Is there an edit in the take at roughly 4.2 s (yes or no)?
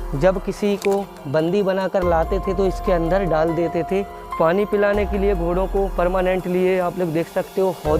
yes